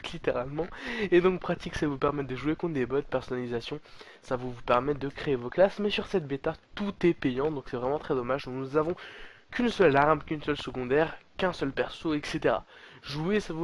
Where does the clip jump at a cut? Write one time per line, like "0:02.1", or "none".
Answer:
0:10.5